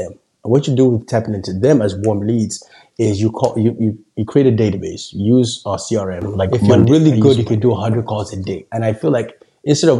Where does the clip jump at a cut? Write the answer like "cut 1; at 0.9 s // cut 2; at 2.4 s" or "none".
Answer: cut 1; at 6.6 s